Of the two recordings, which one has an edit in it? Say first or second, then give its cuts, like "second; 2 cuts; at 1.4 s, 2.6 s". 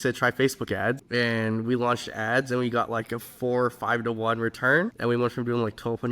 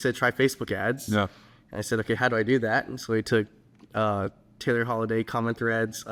first; 2 cuts; at 1.0 s, 4.9 s